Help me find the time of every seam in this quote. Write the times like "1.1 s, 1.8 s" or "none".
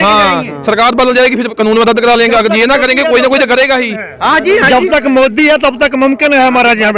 none